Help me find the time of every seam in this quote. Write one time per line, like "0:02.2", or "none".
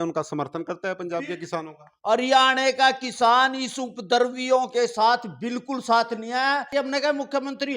0:06.7